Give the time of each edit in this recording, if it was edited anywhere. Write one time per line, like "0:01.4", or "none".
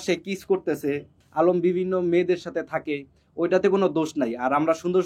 0:01.2